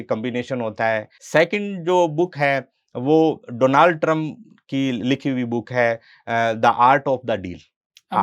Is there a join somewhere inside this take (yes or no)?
yes